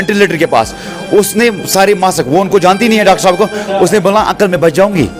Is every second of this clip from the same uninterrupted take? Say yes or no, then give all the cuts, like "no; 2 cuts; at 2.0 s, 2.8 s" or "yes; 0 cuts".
yes; 0 cuts